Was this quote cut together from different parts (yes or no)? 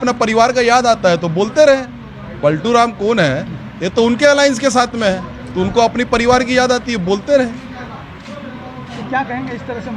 no